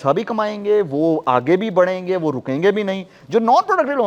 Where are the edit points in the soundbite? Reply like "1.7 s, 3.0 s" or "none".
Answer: none